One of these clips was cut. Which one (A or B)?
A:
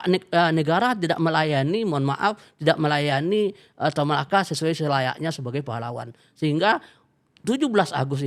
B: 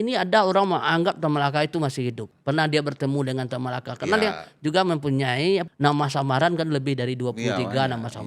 B